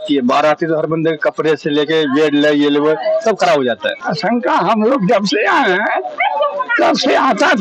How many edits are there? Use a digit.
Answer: 1